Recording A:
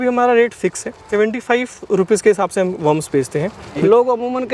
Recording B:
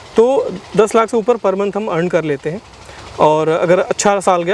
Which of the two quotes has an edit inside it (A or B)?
A